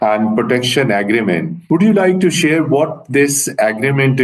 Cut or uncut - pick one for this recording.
cut